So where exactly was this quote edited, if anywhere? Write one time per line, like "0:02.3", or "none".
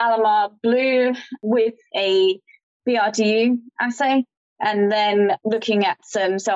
0:01.3
0:05.4